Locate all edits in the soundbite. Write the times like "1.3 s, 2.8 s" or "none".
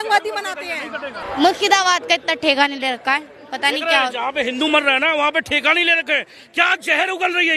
1.2 s